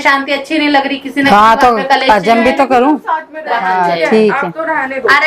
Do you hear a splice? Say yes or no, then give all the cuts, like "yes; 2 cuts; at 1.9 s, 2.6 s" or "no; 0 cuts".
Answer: yes; 1 cut; at 3.7 s